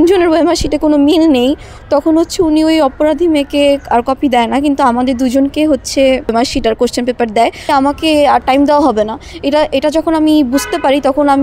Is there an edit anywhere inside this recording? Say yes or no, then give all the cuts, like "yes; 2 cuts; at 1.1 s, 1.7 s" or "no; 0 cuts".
yes; 2 cuts; at 6.3 s, 7.6 s